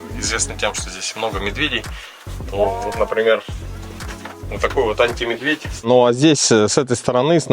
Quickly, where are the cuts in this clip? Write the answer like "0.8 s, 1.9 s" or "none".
5.7 s